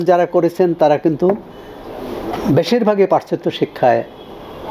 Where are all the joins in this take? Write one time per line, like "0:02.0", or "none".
none